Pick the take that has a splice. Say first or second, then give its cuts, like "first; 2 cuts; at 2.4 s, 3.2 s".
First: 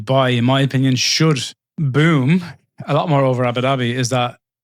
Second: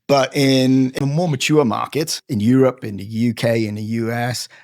second; 1 cut; at 1.0 s